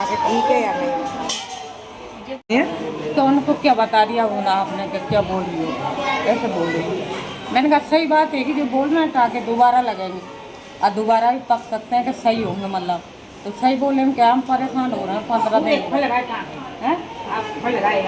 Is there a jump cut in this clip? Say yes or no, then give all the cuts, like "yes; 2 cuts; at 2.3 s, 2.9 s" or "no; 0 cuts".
yes; 1 cut; at 2.5 s